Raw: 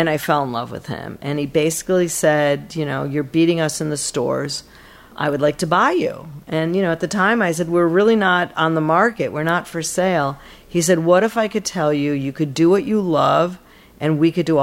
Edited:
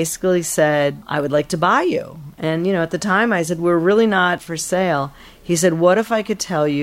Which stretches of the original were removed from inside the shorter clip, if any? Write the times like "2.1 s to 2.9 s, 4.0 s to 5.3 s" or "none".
2.7 s to 5.1 s, 8.5 s to 9.7 s